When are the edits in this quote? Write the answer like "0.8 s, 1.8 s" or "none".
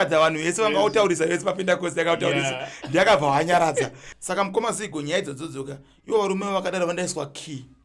4.0 s